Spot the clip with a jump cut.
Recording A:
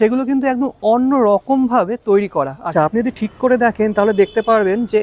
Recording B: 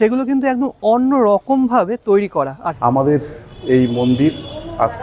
B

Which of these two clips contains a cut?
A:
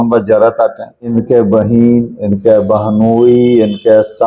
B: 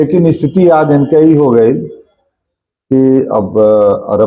A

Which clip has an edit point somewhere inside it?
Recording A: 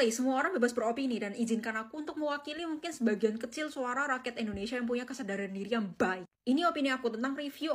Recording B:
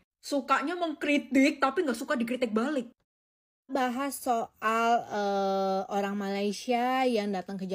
B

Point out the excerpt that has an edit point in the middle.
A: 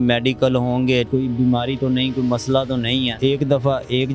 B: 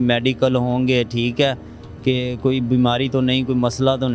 A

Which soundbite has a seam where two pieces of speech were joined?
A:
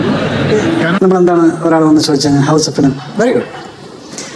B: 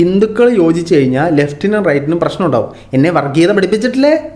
A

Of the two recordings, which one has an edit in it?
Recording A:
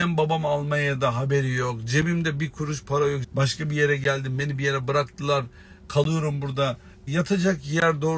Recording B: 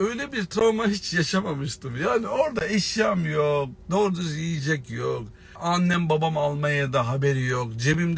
A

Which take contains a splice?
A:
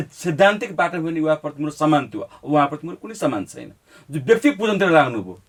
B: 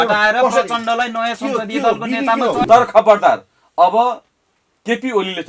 B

